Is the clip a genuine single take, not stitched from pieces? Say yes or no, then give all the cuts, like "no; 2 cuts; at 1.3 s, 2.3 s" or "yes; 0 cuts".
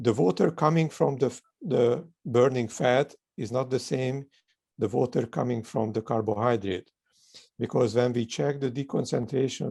yes; 0 cuts